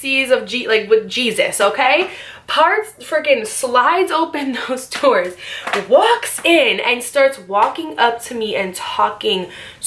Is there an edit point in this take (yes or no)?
no